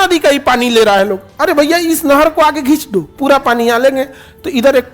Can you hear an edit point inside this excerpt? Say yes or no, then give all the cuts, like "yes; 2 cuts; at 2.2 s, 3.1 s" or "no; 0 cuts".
yes; 1 cut; at 3.1 s